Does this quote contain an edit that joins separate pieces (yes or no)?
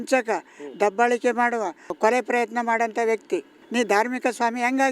yes